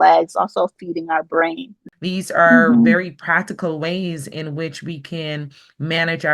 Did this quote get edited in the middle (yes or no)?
yes